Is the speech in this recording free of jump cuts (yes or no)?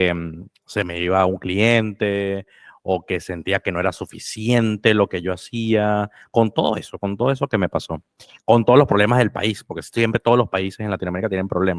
yes